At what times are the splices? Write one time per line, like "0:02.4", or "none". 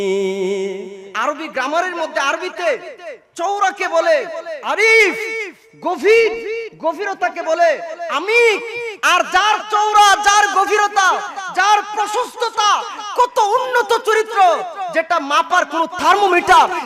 0:01.0